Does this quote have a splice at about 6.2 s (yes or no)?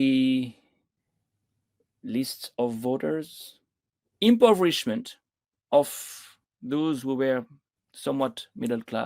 no